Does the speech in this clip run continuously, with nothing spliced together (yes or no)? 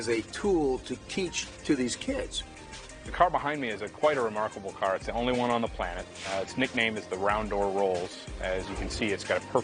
no